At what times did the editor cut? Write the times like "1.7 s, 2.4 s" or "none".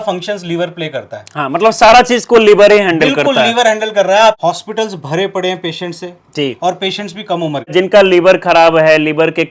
4.4 s, 7.7 s